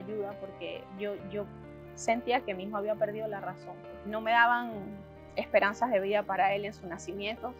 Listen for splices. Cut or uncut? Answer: cut